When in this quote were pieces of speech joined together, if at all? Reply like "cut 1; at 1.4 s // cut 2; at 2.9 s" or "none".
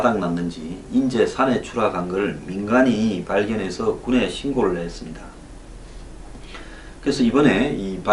none